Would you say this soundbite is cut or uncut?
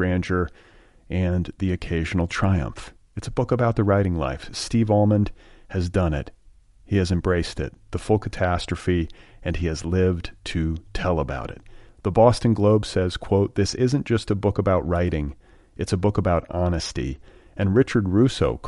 uncut